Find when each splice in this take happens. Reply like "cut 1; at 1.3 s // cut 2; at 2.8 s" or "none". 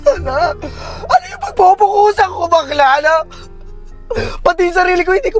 none

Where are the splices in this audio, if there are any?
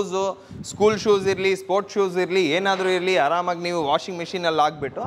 none

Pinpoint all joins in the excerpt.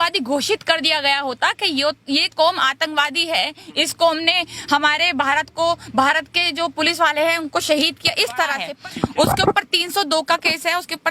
cut 1; at 8.6 s

